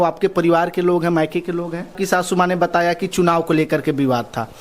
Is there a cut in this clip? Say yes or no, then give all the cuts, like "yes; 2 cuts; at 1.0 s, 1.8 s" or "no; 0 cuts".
yes; 1 cut; at 2.0 s